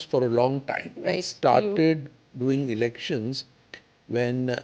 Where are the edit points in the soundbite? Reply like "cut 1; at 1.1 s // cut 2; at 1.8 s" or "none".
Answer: none